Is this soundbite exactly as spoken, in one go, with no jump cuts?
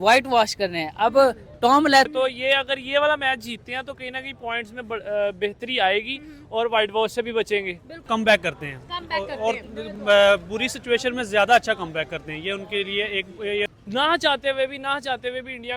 no; 3 cuts; at 2.1 s, 8.0 s, 13.7 s

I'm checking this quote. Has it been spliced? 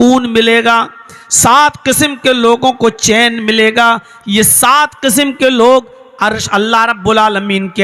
no; 0 cuts

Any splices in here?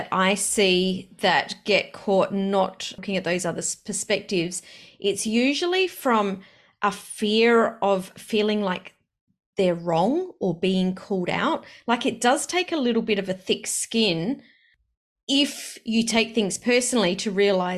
no; 0 cuts

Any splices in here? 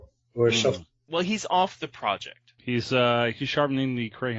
yes; 1 cut; at 1.9 s

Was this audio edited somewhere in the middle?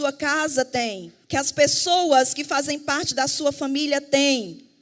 yes; 1 cut; at 1.1 s

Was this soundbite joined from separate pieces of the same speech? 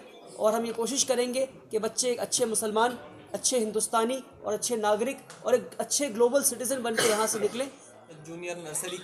yes; 1 cut; at 7.8 s

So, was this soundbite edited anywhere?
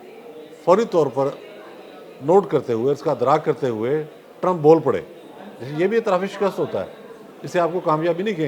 no; 0 cuts

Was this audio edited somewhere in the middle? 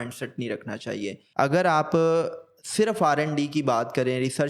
yes; 1 cut; at 1.2 s

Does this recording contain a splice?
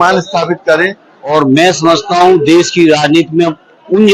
yes; 1 cut; at 1.3 s

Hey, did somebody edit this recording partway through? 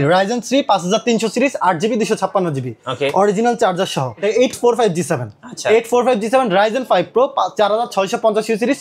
yes; 1 cut; at 4.1 s

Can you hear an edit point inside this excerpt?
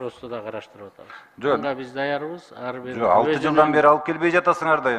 yes; 1 cut; at 1.6 s

